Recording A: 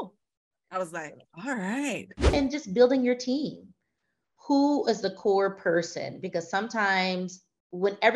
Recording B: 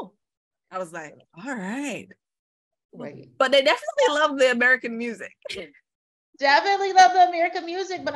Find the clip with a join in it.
A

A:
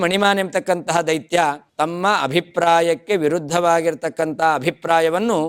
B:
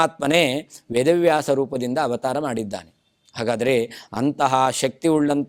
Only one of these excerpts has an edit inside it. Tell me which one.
A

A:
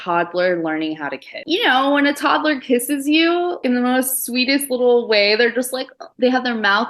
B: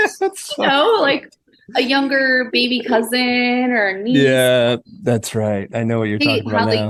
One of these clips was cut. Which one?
A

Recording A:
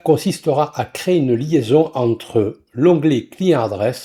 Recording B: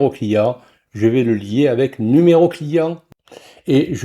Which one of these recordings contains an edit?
B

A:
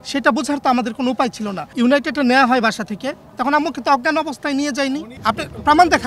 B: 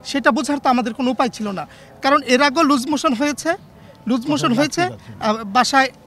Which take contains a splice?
A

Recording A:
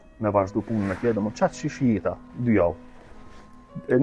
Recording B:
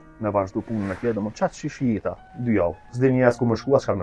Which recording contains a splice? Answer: B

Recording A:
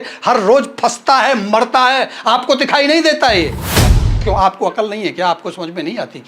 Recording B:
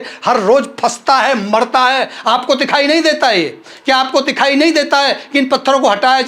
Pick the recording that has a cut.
A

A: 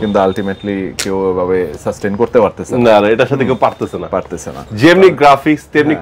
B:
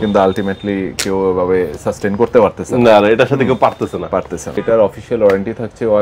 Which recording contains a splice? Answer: B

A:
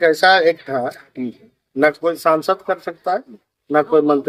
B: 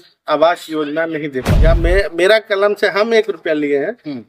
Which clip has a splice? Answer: B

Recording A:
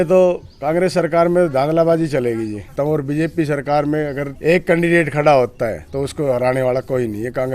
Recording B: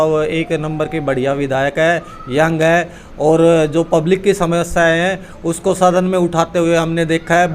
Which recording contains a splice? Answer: A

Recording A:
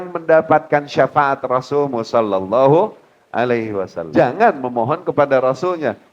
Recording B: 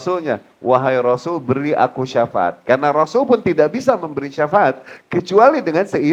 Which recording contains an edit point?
A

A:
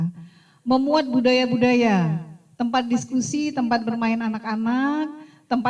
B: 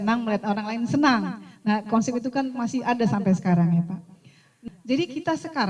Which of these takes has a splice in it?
B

